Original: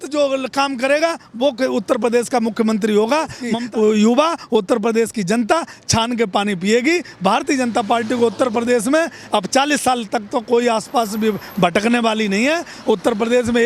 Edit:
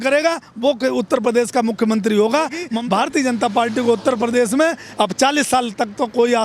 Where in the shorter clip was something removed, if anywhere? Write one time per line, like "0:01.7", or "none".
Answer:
0:02.8